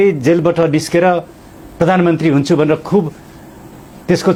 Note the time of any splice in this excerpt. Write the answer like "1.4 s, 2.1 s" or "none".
none